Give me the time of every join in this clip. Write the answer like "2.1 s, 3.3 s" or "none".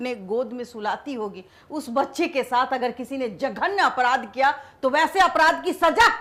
none

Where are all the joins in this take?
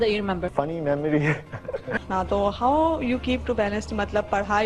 1.9 s

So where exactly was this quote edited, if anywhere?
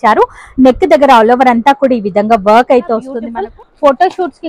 3.2 s

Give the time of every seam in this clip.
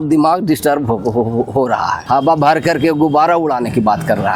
2.0 s

